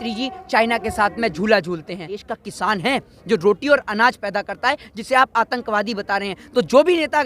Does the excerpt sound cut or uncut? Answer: cut